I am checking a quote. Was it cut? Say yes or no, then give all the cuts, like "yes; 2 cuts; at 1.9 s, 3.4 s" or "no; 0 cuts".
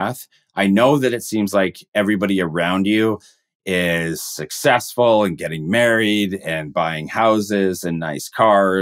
no; 0 cuts